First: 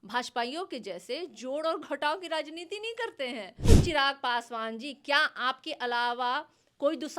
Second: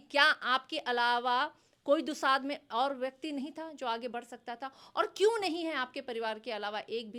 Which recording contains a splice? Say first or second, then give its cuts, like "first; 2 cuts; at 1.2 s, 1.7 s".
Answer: first; 1 cut; at 3.7 s